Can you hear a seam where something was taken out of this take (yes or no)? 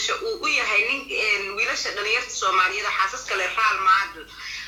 no